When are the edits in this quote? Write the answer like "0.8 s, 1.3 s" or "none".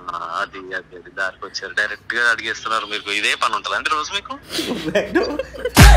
4.4 s